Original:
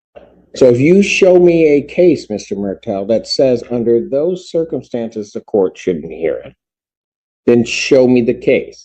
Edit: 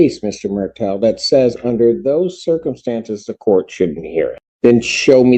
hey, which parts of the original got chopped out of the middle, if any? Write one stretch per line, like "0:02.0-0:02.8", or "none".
0:06.5-0:07.3